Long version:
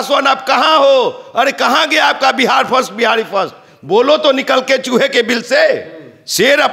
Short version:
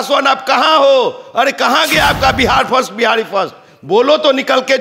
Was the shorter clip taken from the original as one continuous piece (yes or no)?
yes